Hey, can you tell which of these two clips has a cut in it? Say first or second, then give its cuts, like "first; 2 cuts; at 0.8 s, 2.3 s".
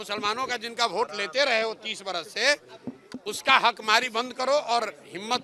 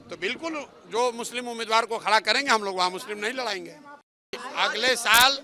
second; 1 cut; at 4.4 s